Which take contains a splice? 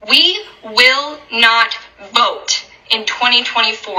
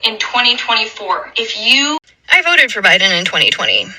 second; 1 cut; at 2.1 s

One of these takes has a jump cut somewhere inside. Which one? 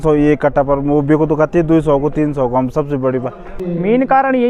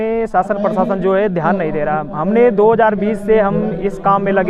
first; 1 cut; at 3.6 s

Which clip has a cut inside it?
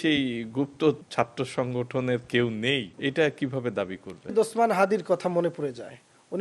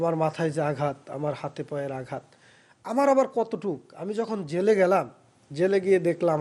first; 3 cuts; at 1.0 s, 2.9 s, 4.3 s

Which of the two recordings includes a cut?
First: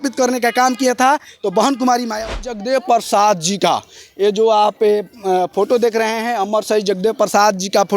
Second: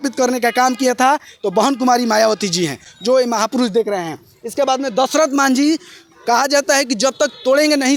first; 1 cut; at 2.5 s

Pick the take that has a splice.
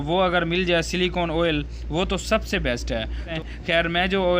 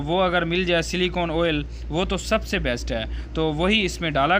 first; 1 cut; at 3.3 s

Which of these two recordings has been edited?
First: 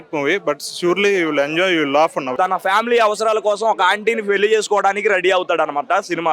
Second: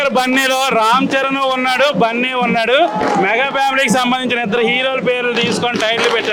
first; 1 cut; at 2.3 s

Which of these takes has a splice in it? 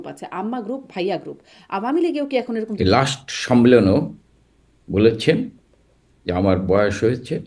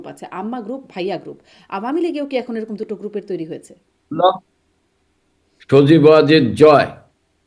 first; 1 cut; at 2.7 s

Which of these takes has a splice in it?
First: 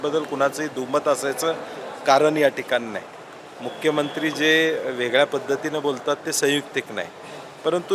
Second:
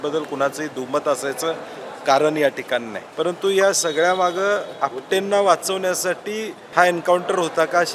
second; 2 cuts; at 3.0 s, 6.6 s

